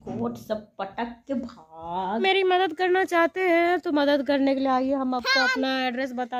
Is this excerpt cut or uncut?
cut